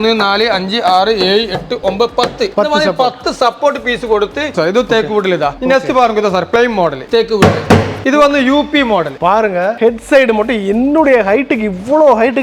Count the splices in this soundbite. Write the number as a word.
four